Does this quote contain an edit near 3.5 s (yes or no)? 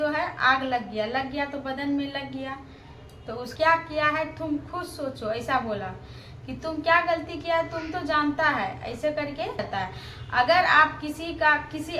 yes